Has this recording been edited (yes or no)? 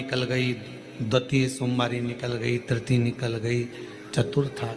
no